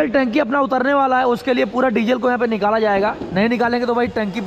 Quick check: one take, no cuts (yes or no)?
yes